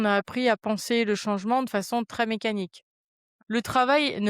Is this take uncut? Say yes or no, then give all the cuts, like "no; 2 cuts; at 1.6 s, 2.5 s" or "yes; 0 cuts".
no; 1 cut; at 3.4 s